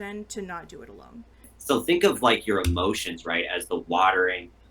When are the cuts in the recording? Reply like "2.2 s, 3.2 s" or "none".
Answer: 1.5 s